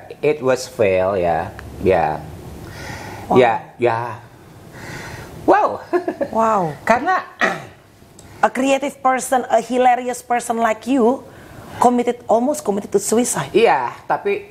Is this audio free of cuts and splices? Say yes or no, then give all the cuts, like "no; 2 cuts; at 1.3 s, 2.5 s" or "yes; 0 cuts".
yes; 0 cuts